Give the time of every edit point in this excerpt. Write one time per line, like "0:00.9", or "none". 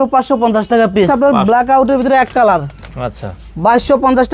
0:01.3